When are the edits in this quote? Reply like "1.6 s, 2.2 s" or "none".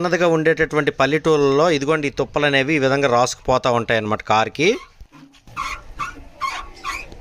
none